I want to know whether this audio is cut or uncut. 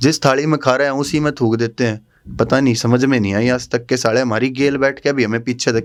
uncut